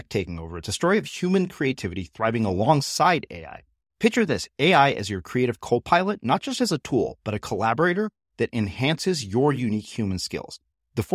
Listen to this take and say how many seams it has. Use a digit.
0